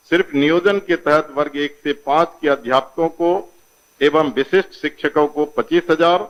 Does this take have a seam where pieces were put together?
no; 0 cuts

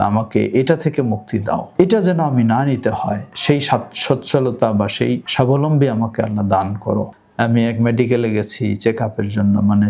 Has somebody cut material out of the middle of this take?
yes; 4 cuts; at 1.7 s, 3.3 s, 5.3 s, 7.2 s

